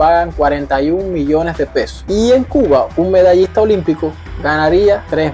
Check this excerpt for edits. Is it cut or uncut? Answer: uncut